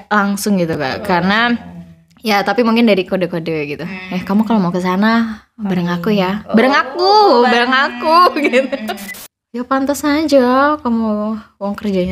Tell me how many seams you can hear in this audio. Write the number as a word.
one